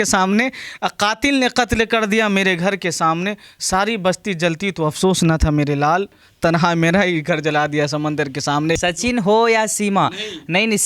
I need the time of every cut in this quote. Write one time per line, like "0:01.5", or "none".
0:08.8